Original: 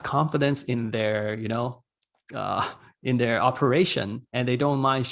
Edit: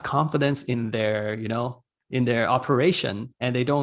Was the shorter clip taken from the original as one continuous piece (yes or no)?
no